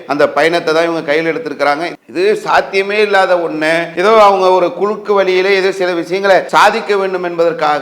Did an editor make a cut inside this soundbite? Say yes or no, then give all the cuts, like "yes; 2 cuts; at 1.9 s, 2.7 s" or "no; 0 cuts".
yes; 3 cuts; at 2.0 s, 3.9 s, 6.5 s